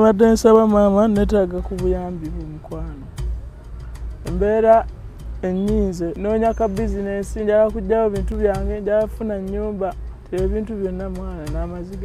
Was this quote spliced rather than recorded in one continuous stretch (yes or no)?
yes